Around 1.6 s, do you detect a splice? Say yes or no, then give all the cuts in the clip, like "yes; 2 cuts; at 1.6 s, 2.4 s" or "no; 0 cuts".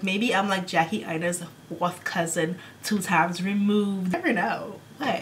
no; 1 cut; at 4.1 s